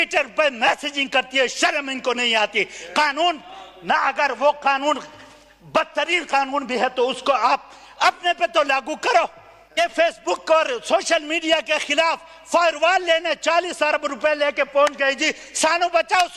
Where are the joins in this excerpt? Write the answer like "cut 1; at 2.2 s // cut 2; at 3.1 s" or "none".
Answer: cut 1; at 9.8 s